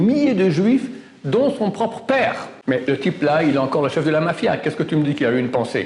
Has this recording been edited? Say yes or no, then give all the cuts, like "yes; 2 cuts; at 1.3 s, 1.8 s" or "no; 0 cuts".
yes; 1 cut; at 2.5 s